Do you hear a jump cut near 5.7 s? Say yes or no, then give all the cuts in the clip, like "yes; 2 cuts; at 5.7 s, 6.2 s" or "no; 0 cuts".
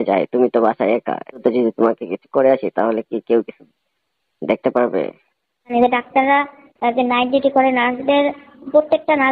yes; 2 cuts; at 1.4 s, 5.7 s